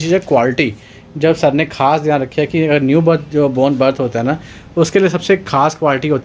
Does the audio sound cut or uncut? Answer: uncut